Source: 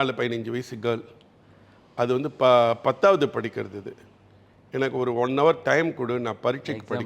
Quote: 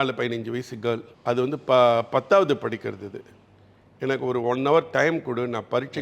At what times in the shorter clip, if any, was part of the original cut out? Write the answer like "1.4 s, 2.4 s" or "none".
1.1 s